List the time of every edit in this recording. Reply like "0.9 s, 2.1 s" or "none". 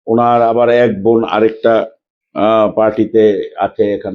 none